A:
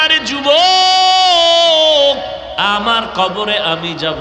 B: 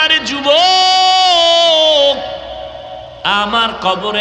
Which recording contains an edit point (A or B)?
A